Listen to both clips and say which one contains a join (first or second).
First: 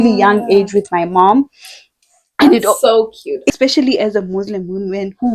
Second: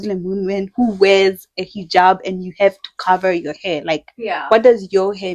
first